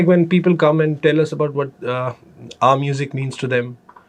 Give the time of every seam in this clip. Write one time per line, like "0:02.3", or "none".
none